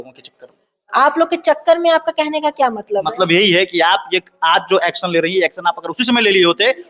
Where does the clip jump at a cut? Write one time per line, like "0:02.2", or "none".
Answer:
none